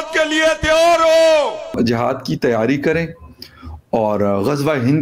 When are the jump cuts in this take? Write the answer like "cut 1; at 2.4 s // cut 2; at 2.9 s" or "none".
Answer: cut 1; at 1.7 s